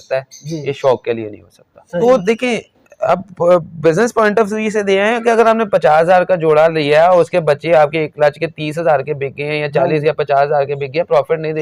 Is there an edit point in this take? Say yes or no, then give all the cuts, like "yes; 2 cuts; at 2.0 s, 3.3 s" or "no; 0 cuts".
yes; 1 cut; at 2.0 s